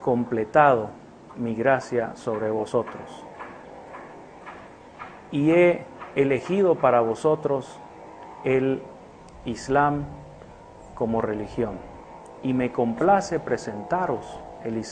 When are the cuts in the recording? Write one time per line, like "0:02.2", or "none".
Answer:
0:12.7